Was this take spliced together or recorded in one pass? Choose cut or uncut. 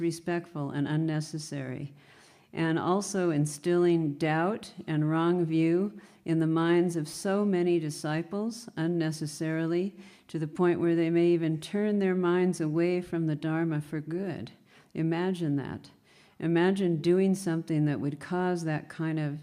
uncut